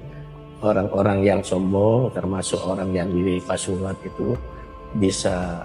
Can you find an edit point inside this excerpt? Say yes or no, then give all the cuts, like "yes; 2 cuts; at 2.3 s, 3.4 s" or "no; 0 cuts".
no; 0 cuts